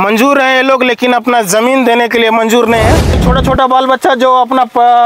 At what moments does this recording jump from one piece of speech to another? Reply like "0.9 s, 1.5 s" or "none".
3.2 s